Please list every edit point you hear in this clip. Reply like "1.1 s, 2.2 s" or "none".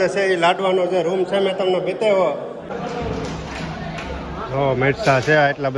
2.6 s